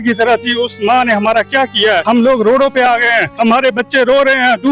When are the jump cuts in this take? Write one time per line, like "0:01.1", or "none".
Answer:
0:02.0
0:03.3